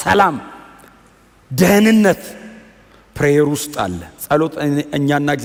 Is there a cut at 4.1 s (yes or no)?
no